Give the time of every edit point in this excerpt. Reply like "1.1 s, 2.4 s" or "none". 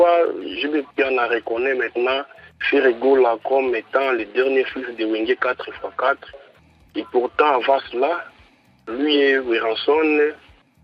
none